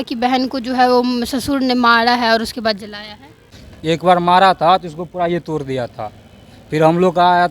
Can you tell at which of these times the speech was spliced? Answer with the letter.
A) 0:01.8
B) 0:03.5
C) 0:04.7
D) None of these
B